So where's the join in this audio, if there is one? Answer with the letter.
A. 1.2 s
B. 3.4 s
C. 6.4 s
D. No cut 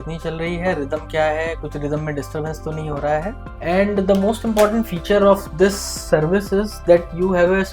B